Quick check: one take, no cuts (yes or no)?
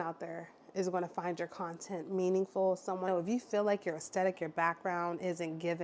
no